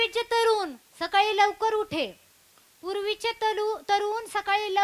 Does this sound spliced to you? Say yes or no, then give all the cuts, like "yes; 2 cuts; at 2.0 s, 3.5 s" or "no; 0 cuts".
no; 0 cuts